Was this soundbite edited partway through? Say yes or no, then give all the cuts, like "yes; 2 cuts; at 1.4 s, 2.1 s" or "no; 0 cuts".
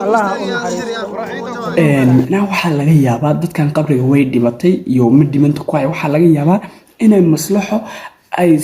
yes; 1 cut; at 1.7 s